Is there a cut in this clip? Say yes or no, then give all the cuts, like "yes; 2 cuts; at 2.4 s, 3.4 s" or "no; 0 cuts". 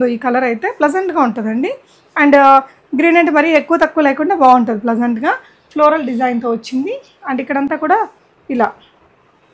no; 0 cuts